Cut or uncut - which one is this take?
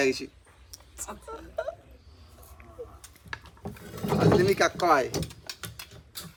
uncut